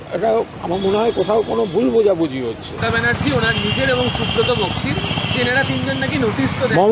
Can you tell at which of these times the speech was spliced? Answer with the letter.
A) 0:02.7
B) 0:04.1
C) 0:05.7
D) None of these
A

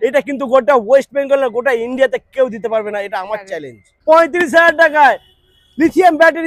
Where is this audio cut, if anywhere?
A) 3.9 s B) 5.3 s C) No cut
A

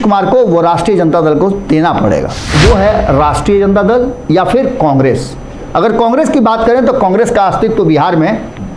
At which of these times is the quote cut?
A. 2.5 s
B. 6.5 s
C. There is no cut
A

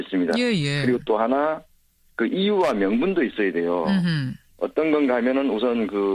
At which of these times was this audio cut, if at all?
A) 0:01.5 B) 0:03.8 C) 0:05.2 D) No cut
A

